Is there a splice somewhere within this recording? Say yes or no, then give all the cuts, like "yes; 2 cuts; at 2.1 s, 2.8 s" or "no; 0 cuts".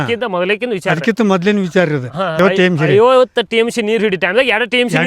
yes; 1 cut; at 2.4 s